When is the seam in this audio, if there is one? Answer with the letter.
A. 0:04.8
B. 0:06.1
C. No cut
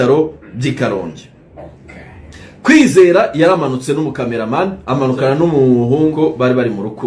B